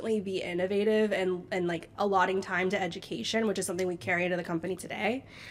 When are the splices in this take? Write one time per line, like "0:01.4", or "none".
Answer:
none

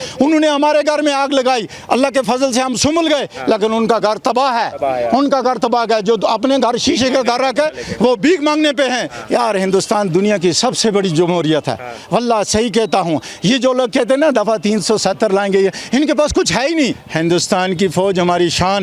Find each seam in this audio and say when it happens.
0:09.1
0:17.0

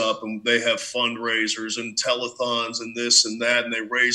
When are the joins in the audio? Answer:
none

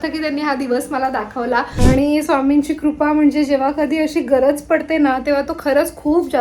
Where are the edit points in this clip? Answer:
0:01.7

